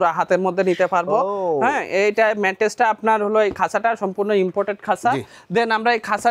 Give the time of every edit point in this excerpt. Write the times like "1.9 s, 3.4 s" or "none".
none